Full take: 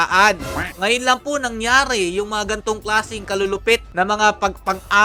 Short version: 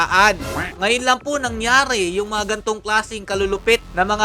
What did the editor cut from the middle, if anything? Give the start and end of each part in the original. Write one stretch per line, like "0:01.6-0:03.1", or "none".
none